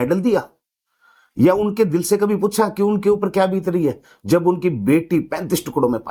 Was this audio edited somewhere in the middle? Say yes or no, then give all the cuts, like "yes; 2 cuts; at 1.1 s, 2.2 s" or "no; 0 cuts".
no; 0 cuts